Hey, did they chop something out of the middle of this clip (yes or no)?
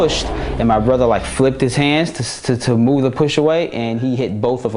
no